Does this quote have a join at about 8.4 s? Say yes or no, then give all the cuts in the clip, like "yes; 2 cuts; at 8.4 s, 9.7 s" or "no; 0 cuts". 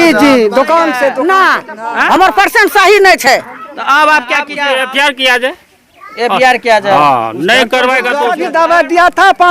yes; 3 cuts; at 1.2 s, 4.5 s, 8.4 s